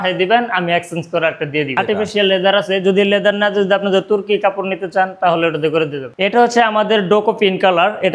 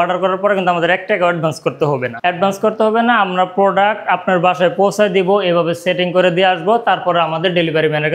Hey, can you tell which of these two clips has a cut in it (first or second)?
first